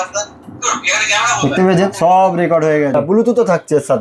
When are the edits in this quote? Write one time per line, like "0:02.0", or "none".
0:02.9